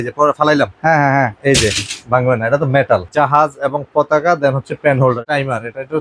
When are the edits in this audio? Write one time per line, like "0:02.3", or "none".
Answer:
0:03.1
0:05.2